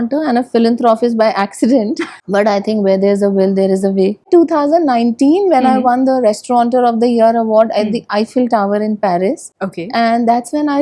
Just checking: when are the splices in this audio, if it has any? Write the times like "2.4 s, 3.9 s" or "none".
2.2 s, 4.3 s